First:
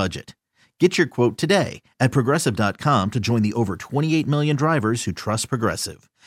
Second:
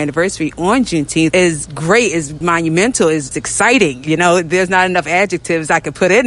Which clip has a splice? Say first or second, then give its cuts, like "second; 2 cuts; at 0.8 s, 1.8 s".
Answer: second; 3 cuts; at 1.3 s, 2.3 s, 3.3 s